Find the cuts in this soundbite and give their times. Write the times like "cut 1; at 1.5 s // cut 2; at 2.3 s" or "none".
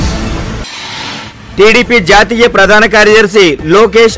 cut 1; at 1.1 s